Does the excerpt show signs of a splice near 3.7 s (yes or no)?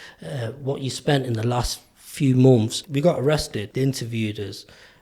yes